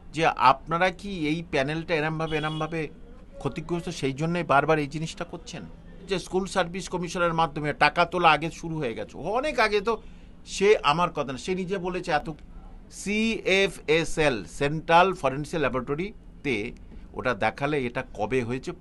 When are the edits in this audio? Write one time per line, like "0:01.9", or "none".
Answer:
0:06.1
0:12.3